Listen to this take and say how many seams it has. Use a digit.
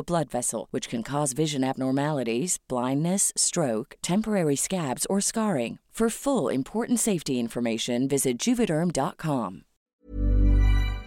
1